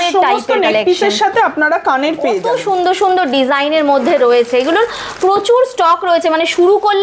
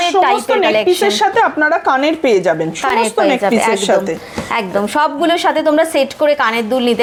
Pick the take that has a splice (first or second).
first